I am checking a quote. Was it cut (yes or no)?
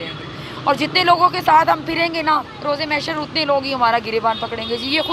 no